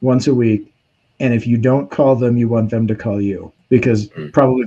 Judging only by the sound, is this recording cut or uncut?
cut